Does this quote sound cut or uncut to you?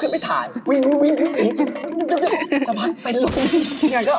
uncut